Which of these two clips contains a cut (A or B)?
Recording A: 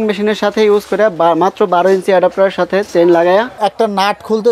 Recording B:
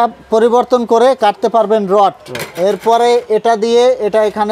A